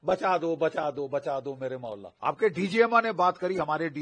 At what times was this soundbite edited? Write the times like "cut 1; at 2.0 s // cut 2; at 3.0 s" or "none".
cut 1; at 2.1 s